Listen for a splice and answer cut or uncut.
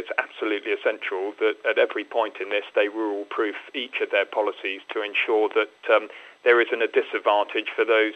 uncut